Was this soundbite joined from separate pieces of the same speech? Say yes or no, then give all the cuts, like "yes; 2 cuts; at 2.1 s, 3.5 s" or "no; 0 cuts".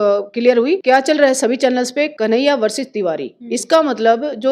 yes; 2 cuts; at 0.8 s, 2.1 s